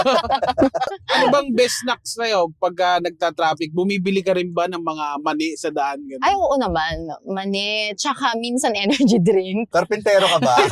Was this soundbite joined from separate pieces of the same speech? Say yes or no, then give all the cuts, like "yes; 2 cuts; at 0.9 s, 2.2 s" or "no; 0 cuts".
yes; 2 cuts; at 1.0 s, 9.7 s